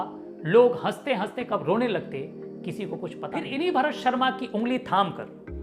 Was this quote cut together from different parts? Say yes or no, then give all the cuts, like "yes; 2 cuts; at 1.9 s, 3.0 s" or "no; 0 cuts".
yes; 1 cut; at 3.5 s